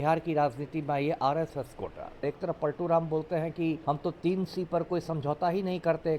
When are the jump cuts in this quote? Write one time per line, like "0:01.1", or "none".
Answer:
0:02.2
0:03.8